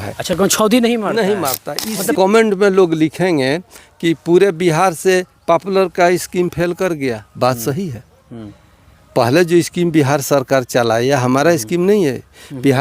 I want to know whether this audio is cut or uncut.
cut